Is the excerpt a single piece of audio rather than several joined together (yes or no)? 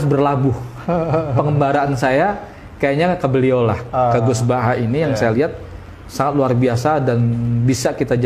yes